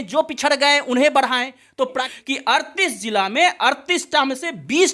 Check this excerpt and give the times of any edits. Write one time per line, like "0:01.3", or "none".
0:02.1